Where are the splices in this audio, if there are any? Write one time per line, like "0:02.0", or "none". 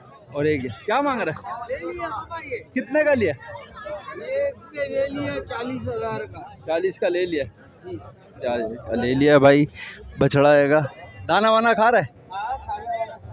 none